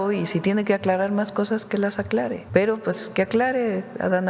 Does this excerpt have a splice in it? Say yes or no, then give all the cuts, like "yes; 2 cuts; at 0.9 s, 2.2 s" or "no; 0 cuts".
yes; 1 cut; at 2.4 s